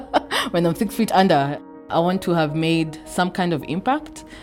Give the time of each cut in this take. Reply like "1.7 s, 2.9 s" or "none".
1.5 s

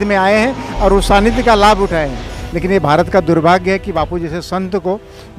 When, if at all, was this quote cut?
2.3 s

